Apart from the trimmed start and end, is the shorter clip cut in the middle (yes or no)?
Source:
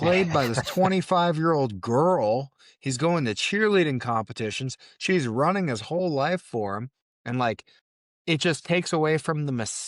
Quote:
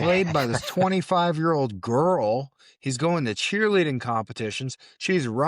no